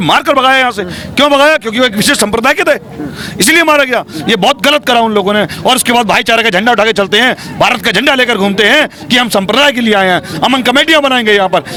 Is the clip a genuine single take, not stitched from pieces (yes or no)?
yes